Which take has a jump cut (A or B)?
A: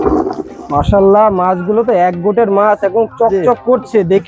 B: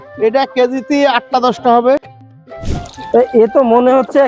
B